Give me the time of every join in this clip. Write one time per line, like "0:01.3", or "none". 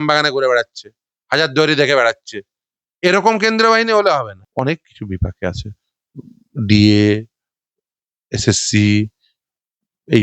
0:04.4